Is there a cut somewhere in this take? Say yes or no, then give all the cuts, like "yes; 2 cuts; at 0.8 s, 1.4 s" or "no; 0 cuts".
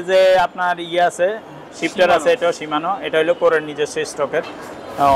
no; 0 cuts